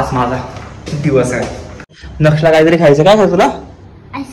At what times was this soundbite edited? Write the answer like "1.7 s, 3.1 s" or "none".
1.9 s